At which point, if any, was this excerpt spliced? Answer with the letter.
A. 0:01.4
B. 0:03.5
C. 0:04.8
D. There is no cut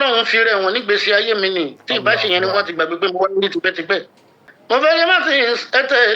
C